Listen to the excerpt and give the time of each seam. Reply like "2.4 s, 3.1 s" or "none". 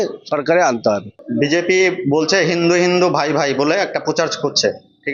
1.2 s